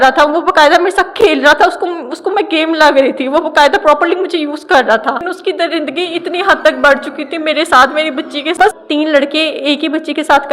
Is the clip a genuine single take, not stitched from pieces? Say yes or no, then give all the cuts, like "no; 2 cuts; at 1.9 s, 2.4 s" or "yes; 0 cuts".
no; 2 cuts; at 5.2 s, 8.8 s